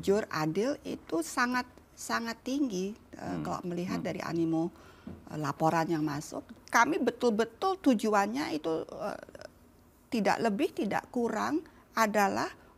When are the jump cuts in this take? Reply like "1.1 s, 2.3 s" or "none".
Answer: 6.6 s